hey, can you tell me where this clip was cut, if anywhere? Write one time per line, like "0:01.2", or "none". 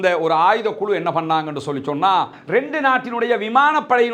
0:02.3